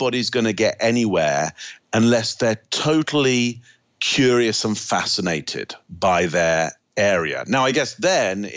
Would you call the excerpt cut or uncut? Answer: uncut